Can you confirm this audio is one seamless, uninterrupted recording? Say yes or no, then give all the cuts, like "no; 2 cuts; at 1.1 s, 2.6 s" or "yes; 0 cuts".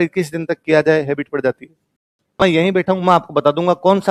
no; 1 cut; at 2.4 s